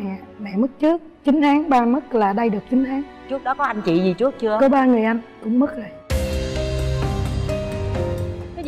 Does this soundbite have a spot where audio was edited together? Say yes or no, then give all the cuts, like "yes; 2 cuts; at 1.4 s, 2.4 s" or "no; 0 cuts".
no; 0 cuts